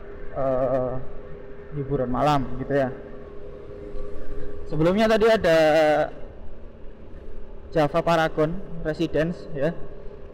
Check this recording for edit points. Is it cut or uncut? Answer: uncut